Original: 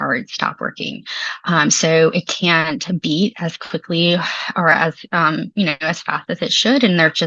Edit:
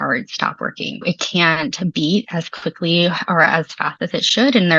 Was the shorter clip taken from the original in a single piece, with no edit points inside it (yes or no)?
no